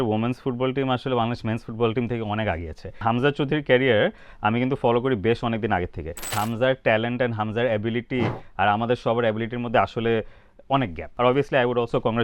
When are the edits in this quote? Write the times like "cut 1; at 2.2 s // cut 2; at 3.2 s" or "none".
cut 1; at 3.0 s // cut 2; at 6.3 s // cut 3; at 11.0 s